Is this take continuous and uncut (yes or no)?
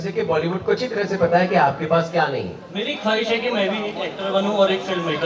no